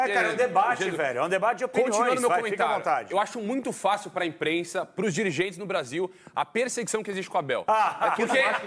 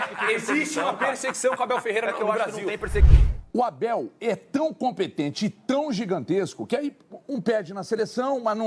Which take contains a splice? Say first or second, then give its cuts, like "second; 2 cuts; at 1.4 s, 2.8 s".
second; 1 cut; at 3.1 s